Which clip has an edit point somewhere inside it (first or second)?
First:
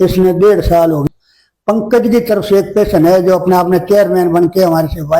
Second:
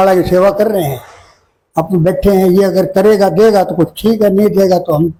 first